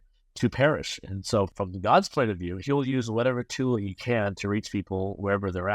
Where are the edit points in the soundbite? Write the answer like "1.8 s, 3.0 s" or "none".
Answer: 1.5 s